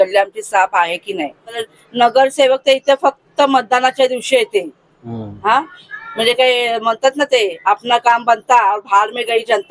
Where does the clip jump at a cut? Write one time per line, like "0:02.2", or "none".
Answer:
0:01.6

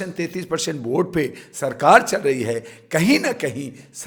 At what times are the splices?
none

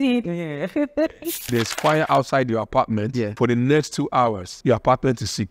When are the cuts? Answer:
0:01.4
0:03.3
0:04.5

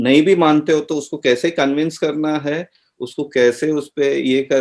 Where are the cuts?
none

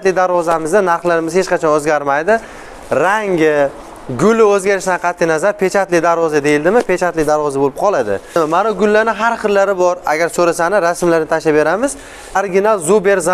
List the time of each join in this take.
0:08.4
0:12.4

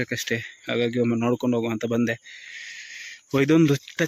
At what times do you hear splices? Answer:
none

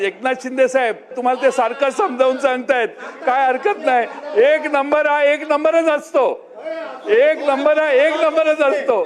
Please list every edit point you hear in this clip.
0:01.2

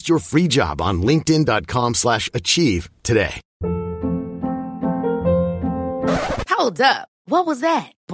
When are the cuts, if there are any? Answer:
0:03.4

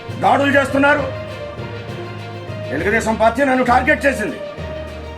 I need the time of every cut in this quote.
0:01.1
0:02.7
0:04.3

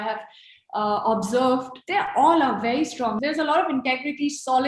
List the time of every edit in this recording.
0:01.8
0:03.2

